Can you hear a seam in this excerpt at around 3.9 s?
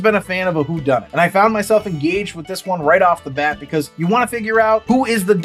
no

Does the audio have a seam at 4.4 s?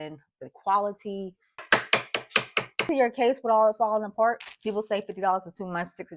yes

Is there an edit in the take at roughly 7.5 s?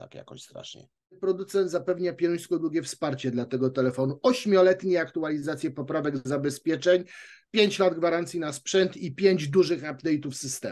no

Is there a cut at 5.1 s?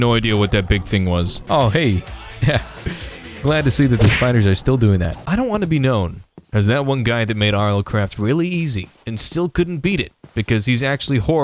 yes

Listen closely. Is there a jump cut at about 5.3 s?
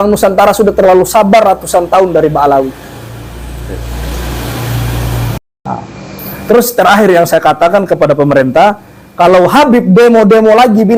yes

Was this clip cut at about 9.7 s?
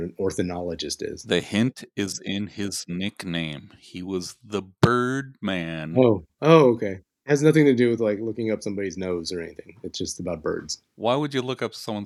no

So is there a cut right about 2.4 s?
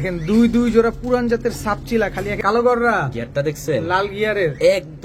yes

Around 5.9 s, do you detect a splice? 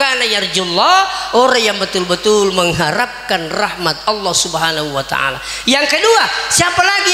no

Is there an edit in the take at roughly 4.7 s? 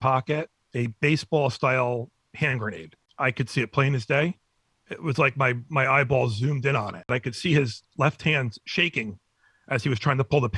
no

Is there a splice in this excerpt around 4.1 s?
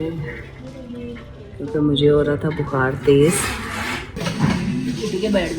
yes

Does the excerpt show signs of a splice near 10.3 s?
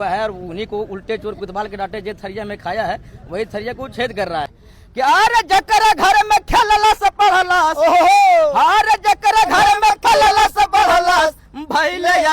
no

